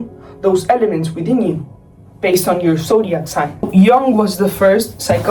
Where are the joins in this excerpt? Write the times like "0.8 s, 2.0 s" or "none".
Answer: none